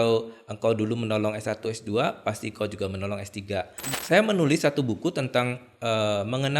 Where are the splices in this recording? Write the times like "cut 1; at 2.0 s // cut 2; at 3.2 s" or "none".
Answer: cut 1; at 3.8 s